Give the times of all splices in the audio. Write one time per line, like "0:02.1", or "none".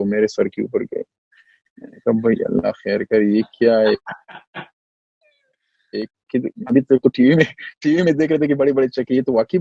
none